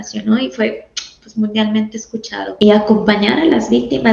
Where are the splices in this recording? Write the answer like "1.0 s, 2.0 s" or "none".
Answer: 2.5 s